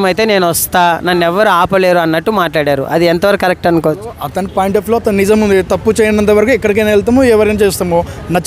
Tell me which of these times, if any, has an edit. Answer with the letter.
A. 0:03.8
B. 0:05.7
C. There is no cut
C